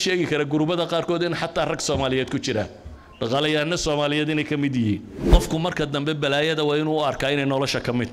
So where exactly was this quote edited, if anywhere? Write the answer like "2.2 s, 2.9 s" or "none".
5.1 s